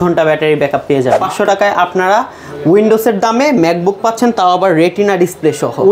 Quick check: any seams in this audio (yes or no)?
yes